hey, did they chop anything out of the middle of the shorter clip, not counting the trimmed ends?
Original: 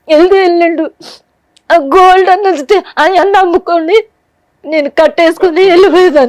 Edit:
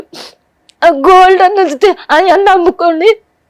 no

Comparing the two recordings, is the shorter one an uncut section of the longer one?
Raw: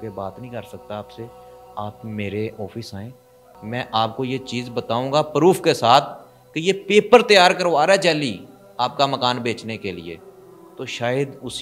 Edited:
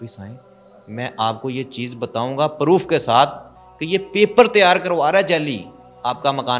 yes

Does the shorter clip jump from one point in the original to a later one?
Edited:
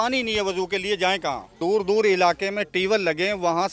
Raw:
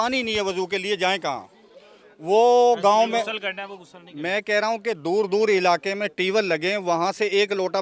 yes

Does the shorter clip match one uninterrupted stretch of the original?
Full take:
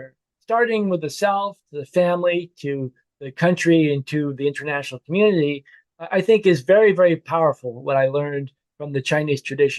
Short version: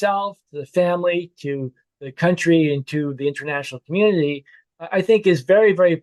yes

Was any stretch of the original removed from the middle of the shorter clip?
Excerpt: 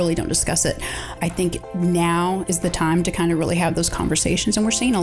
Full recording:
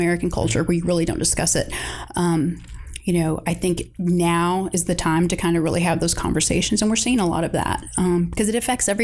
yes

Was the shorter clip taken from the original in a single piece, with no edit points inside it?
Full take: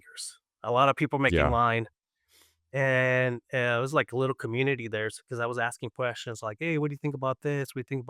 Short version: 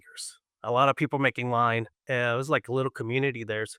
no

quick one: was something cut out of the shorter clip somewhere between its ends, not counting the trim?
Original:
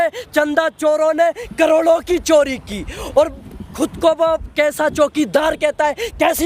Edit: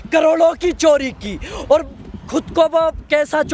no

